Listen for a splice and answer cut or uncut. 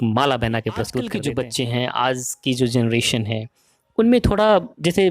cut